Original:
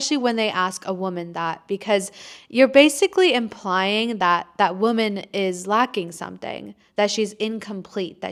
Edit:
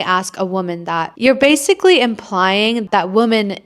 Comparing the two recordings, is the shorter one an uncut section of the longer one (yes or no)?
no